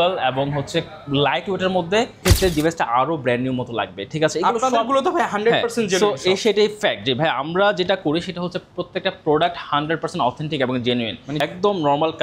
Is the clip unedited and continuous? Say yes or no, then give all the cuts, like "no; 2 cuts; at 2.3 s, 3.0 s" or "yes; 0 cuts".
no; 2 cuts; at 2.2 s, 11.3 s